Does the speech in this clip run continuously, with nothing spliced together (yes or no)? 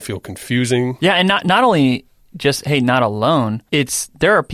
no